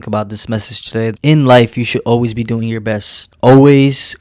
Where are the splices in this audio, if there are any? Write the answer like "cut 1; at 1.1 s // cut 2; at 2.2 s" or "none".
cut 1; at 1.2 s